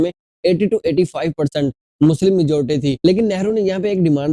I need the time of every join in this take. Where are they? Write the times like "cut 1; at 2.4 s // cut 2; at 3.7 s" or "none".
cut 1; at 3.0 s